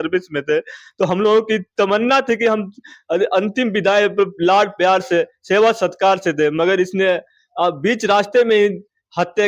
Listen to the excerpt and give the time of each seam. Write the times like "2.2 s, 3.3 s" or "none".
none